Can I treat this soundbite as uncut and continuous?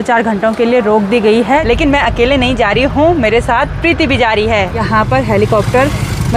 no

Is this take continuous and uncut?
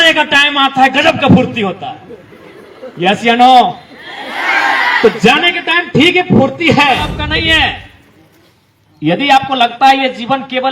no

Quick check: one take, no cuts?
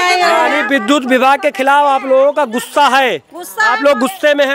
yes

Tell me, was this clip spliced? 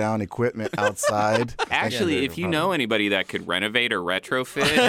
yes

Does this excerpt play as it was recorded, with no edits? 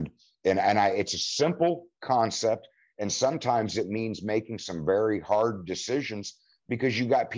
yes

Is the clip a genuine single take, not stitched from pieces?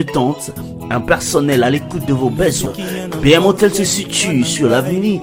yes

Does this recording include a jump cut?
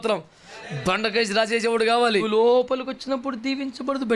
yes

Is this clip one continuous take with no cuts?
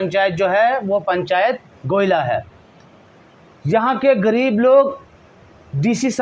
yes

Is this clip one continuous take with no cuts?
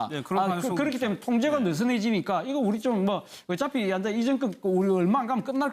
no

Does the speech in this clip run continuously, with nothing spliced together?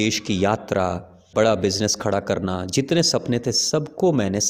yes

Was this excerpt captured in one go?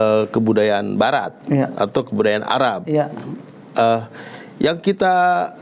yes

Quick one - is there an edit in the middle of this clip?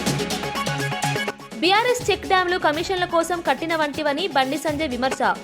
yes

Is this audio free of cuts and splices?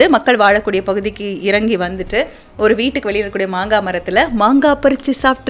yes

